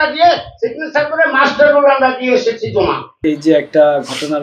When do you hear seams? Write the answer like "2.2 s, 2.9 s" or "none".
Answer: 3.2 s